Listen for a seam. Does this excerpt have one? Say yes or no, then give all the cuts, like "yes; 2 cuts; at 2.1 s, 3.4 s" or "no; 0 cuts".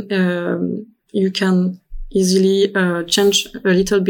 no; 0 cuts